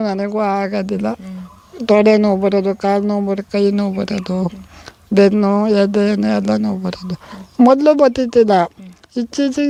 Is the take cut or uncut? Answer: uncut